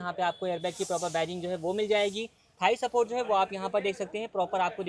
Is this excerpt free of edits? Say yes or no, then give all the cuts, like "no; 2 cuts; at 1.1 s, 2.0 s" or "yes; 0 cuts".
yes; 0 cuts